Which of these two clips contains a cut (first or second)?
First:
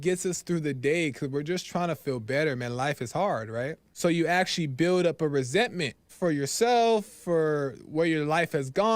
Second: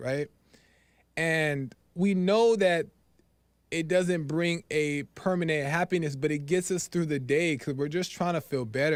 first